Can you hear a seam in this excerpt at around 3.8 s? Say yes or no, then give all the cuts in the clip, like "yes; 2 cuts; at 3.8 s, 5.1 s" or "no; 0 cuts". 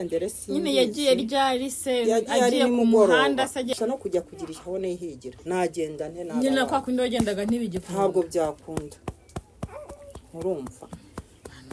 yes; 1 cut; at 3.8 s